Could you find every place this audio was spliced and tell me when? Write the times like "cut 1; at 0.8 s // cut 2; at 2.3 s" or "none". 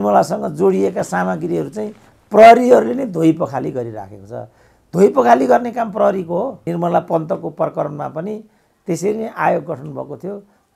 cut 1; at 6.6 s